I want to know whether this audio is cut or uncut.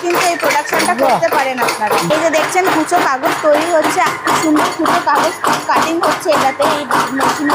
cut